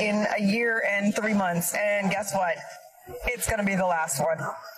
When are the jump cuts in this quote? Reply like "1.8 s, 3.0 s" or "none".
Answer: 1.9 s